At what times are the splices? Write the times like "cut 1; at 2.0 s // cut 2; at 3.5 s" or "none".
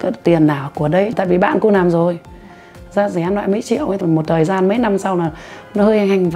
cut 1; at 1.1 s // cut 2; at 4.0 s